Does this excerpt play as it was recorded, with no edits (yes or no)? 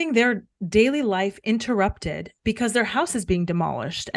yes